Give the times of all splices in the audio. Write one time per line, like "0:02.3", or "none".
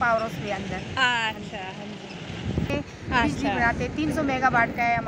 0:02.7